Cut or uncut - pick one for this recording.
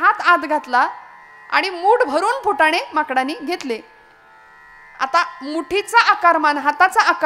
uncut